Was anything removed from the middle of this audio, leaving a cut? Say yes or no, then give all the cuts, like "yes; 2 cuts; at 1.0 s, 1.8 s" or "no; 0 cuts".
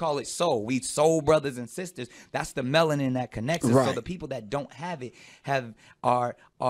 yes; 1 cut; at 5.0 s